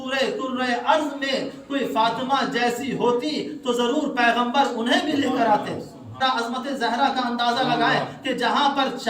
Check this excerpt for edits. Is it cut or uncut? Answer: cut